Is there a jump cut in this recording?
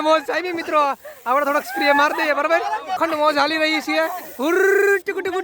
yes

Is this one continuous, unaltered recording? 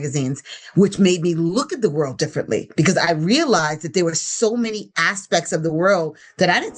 yes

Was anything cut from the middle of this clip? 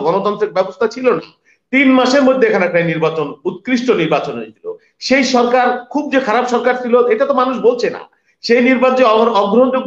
no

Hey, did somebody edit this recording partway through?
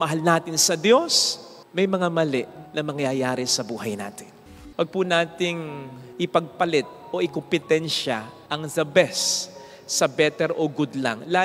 yes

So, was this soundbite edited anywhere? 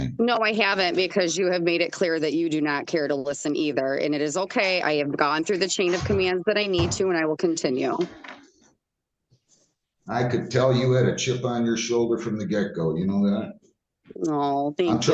no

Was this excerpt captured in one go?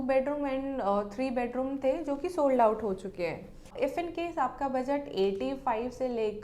no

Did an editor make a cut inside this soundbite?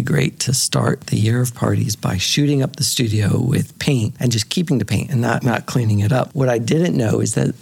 yes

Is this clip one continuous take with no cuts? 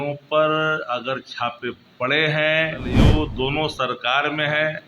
no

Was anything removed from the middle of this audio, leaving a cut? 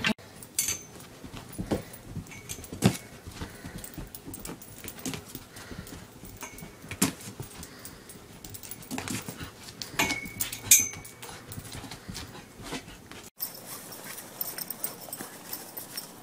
yes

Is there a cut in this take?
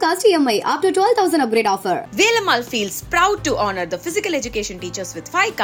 no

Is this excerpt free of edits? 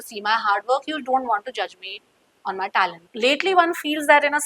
no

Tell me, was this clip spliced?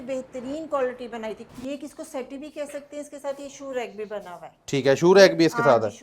yes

